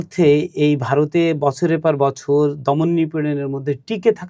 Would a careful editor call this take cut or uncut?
uncut